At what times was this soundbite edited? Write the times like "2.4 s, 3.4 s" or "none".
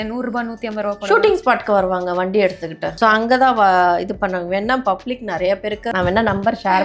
2.9 s, 5.9 s